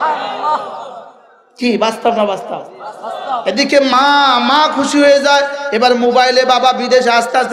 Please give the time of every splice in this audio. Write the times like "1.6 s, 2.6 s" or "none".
none